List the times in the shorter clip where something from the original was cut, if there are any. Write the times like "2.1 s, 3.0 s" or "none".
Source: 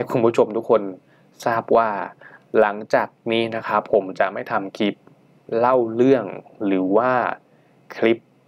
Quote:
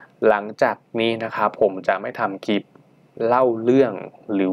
none